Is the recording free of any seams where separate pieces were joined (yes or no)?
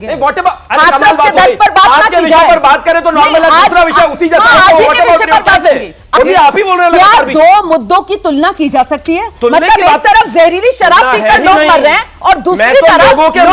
no